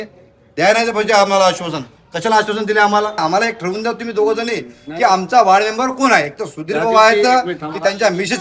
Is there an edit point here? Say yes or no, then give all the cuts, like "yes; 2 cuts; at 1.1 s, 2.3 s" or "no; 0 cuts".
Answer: yes; 1 cut; at 3.2 s